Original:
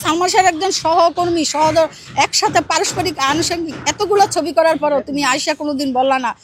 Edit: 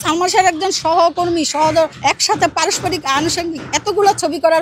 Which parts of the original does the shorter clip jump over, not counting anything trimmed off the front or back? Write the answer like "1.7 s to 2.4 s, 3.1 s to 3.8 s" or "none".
2.0 s to 2.1 s